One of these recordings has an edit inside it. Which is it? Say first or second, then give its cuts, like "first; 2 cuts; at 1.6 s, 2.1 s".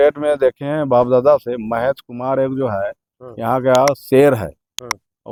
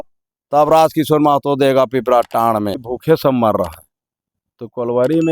second; 1 cut; at 2.9 s